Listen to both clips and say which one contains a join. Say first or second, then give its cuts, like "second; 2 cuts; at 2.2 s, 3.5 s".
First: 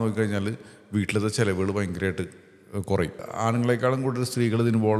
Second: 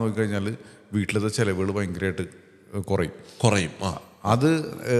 first; 1 cut; at 3.3 s